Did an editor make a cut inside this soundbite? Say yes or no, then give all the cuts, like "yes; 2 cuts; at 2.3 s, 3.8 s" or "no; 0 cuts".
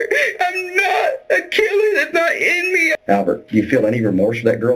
yes; 1 cut; at 3.0 s